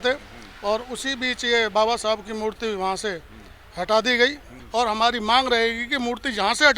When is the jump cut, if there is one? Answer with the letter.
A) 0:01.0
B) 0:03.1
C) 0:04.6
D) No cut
C